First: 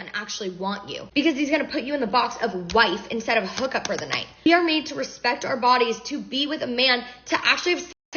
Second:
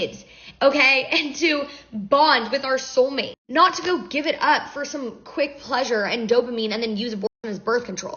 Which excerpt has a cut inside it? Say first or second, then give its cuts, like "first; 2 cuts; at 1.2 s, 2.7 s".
first; 2 cuts; at 1.0 s, 4.5 s